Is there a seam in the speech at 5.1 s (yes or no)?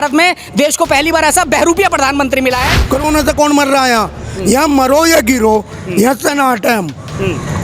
no